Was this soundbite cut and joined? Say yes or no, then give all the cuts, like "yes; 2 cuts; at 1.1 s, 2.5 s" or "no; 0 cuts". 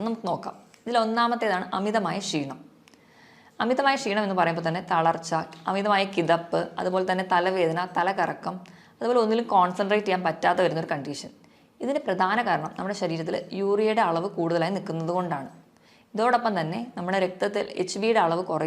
no; 0 cuts